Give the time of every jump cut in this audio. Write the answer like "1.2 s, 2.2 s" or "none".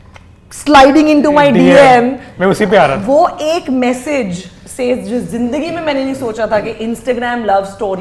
none